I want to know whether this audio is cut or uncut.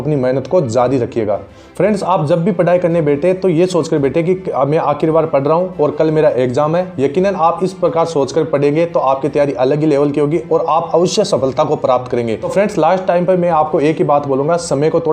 cut